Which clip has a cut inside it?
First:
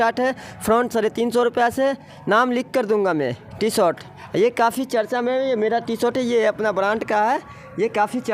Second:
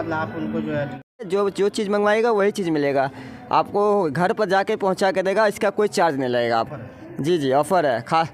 second; 2 cuts; at 1.2 s, 6.7 s

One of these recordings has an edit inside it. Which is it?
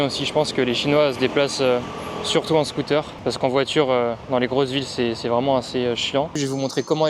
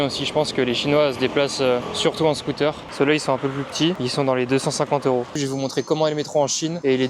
second; 3 cuts; at 1.9 s, 2.8 s, 5.3 s

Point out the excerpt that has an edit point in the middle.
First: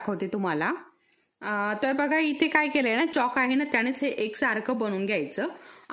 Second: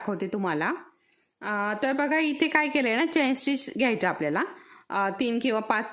first; 1 cut; at 3.1 s

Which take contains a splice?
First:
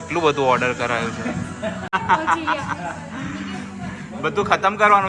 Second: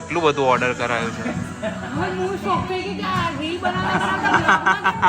first; 1 cut; at 1.9 s

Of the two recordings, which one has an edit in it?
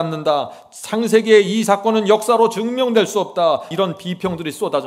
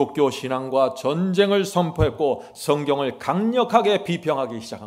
first; 1 cut; at 3.7 s

